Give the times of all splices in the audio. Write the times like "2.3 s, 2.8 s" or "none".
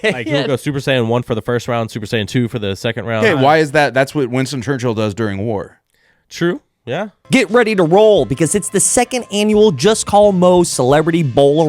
3.2 s, 7.1 s